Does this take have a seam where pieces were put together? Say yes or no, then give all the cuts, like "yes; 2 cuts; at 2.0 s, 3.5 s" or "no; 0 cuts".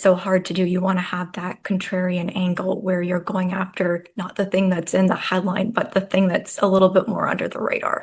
no; 0 cuts